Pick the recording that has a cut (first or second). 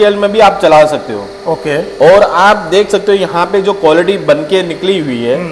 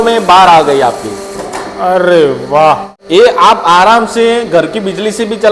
second